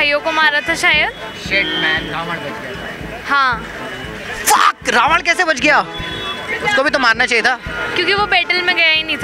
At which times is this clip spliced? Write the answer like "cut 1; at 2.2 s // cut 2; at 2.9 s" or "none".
none